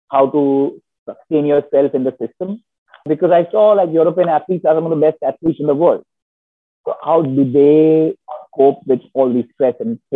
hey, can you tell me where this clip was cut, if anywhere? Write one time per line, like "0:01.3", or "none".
none